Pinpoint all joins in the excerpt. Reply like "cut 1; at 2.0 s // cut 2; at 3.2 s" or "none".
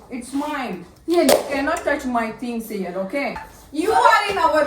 cut 1; at 3.4 s